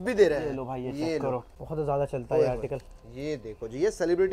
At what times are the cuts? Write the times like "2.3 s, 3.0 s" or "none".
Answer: 1.4 s